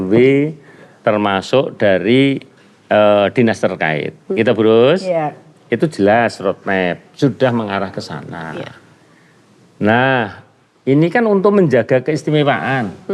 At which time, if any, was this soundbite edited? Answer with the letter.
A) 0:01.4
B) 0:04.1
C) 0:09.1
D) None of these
D